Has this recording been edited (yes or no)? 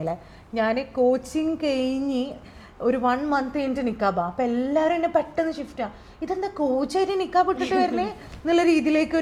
no